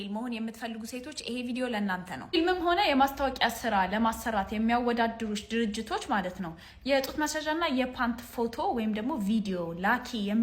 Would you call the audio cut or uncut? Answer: uncut